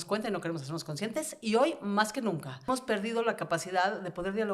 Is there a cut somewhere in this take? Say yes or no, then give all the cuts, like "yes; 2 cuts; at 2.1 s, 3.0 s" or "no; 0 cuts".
yes; 1 cut; at 2.7 s